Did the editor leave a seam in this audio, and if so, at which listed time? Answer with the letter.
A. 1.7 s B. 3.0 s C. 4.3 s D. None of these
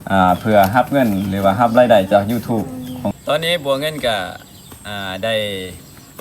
B